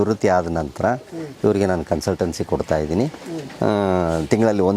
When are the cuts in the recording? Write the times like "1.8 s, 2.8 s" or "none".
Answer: none